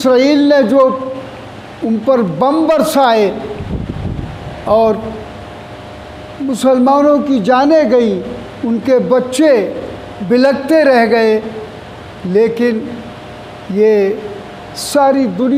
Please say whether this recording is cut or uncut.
uncut